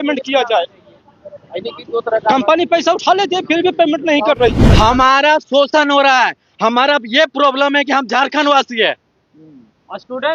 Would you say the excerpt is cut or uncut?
cut